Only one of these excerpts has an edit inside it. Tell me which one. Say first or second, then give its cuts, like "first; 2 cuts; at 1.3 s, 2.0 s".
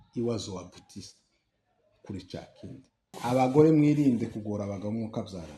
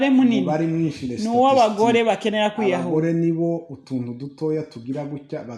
first; 1 cut; at 3.2 s